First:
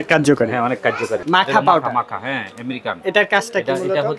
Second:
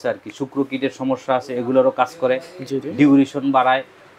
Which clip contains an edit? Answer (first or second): first